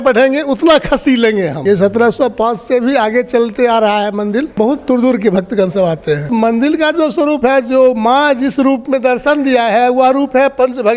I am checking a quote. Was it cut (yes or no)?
yes